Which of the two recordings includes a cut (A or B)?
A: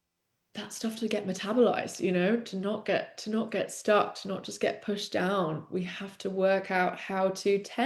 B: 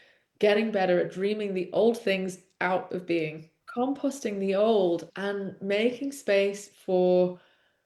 B